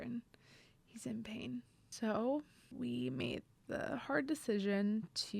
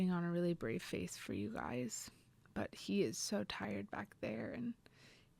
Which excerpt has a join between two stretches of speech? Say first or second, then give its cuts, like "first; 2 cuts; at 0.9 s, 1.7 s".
first; 2 cuts; at 1.8 s, 2.7 s